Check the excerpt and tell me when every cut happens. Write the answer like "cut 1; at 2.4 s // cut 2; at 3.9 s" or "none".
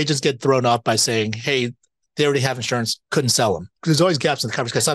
cut 1; at 3.0 s // cut 2; at 3.7 s